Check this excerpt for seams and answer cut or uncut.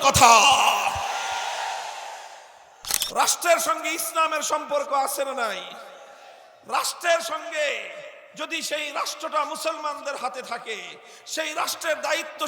cut